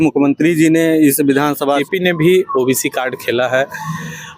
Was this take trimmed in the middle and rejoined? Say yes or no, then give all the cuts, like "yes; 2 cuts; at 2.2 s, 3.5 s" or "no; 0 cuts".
yes; 1 cut; at 1.6 s